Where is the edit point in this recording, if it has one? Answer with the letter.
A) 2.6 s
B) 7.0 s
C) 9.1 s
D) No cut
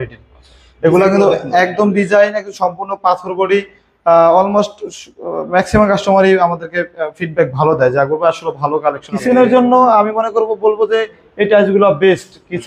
C